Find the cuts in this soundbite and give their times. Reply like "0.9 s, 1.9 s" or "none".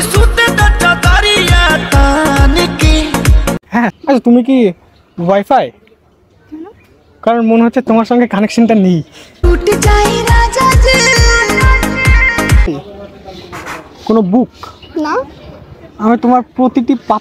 3.9 s, 12.7 s